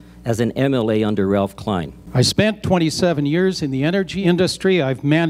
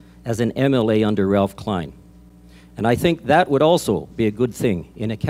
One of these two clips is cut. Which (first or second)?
first